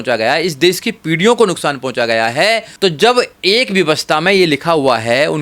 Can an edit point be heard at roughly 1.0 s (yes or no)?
no